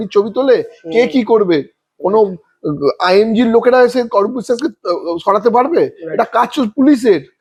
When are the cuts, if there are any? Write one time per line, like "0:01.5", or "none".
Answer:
none